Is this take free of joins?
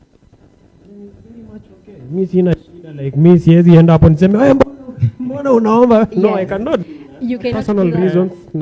no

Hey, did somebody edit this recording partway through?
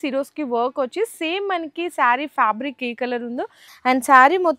yes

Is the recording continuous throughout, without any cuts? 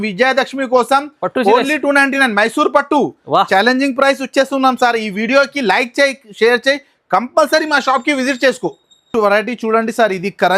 yes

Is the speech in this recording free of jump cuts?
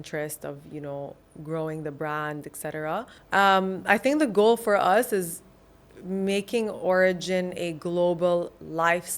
no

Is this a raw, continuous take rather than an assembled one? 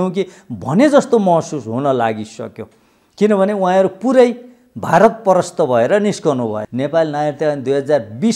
no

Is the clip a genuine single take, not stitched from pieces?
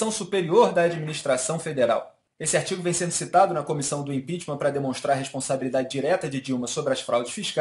no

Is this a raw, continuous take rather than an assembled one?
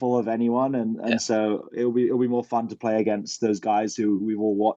yes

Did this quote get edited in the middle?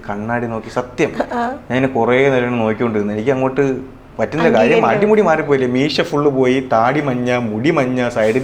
no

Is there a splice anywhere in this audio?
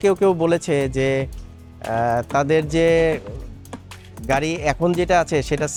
no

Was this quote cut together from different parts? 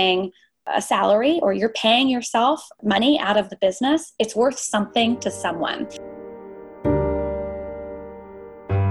yes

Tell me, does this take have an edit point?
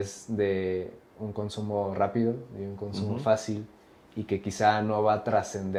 no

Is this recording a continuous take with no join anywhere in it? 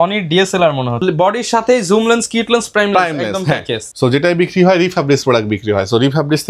no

